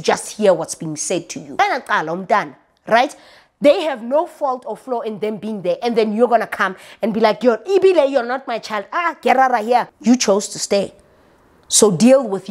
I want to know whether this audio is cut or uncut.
cut